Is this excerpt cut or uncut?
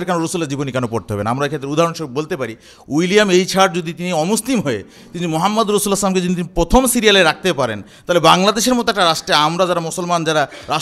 uncut